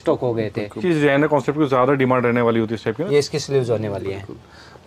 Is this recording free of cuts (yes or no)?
no